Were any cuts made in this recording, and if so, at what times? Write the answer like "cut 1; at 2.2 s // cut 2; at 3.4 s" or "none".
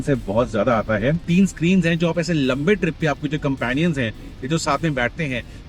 cut 1; at 1.2 s